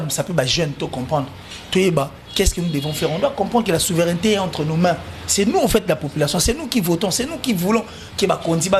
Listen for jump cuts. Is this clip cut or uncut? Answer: uncut